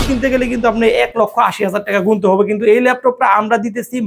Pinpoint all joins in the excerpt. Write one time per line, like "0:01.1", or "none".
none